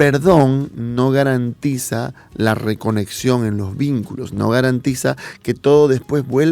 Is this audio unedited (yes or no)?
yes